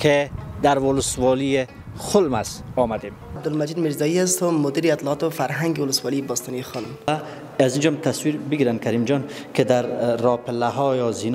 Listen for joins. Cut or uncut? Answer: cut